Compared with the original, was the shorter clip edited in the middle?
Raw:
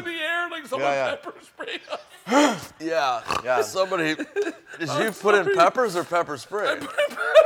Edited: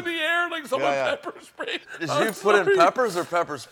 yes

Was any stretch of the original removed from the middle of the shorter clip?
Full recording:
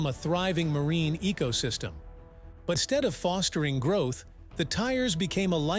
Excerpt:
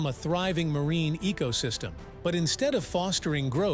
yes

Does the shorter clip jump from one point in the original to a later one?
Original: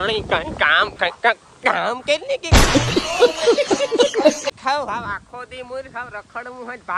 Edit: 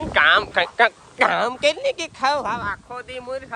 yes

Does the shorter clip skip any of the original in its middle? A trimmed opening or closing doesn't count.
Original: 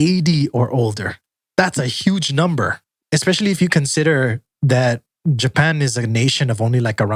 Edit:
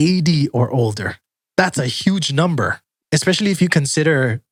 no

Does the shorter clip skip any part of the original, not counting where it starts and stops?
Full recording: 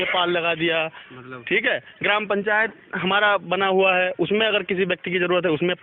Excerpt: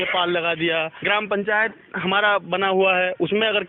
yes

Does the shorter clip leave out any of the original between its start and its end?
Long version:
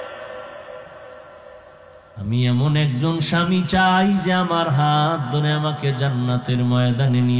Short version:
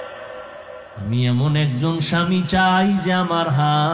yes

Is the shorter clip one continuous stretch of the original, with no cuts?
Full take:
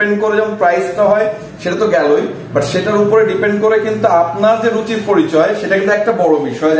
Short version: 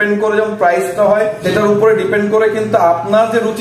no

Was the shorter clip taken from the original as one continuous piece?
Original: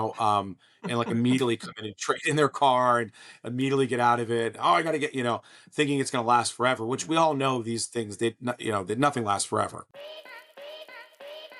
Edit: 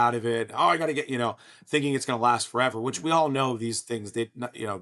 yes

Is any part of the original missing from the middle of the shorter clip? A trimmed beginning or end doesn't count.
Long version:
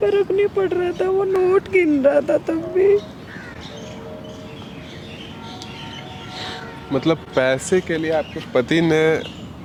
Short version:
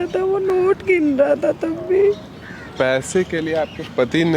yes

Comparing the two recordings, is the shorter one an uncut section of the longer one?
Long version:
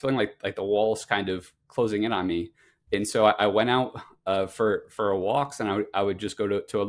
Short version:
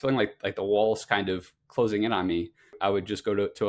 no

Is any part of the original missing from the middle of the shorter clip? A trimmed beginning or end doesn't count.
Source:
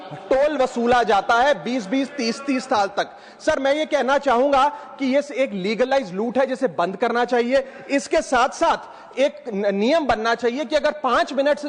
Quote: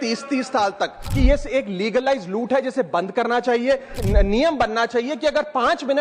yes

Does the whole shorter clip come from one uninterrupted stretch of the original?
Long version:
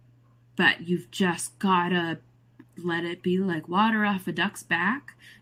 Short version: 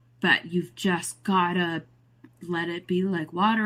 yes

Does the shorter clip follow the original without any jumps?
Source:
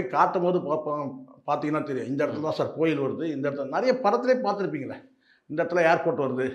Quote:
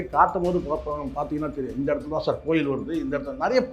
no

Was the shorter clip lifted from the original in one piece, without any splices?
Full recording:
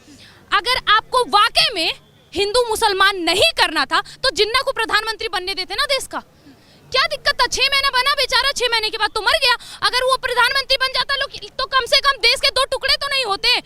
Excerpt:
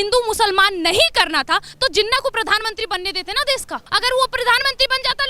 no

